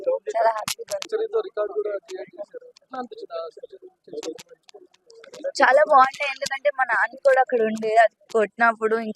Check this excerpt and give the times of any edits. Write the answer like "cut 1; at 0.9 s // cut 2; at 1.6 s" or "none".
cut 1; at 1.0 s

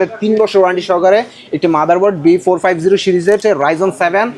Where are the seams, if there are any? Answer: cut 1; at 3.4 s

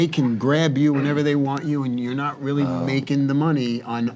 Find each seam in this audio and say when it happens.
none

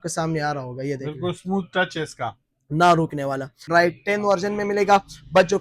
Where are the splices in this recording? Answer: cut 1; at 3.7 s

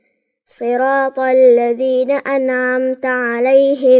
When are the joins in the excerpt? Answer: none

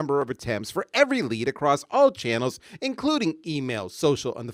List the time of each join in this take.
none

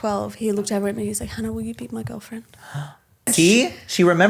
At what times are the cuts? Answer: cut 1; at 3.3 s

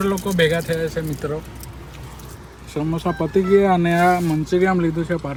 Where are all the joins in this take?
none

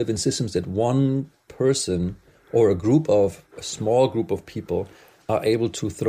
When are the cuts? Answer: none

